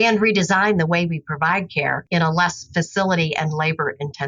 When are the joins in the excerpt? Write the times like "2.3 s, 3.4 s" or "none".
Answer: none

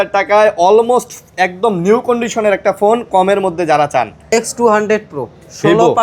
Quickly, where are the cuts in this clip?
4.2 s

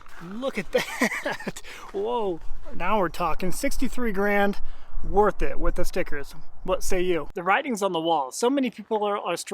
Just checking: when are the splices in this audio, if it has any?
7.3 s

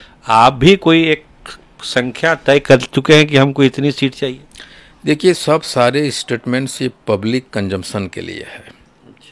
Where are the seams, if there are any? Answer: none

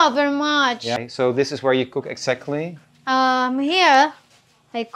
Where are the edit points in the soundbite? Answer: 1.0 s

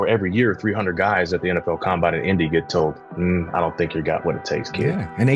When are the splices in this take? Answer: none

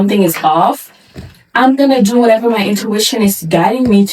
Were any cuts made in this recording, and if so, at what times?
none

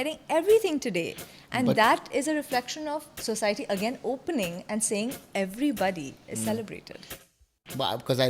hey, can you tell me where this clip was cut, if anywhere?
7.2 s

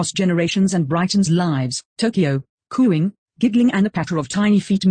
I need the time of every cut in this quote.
2.1 s

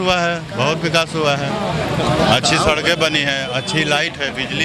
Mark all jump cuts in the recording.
none

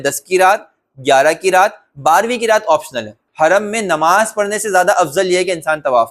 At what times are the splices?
3.2 s

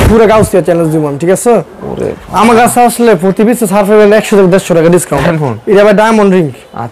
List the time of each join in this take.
5.2 s

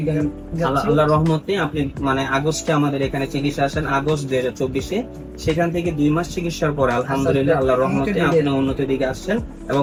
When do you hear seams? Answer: none

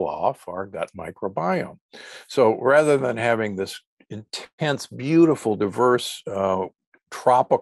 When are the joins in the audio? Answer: none

